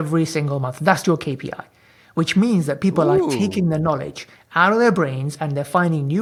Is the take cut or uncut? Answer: uncut